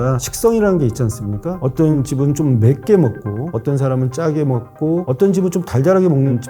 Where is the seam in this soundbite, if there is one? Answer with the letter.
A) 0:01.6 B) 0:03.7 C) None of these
A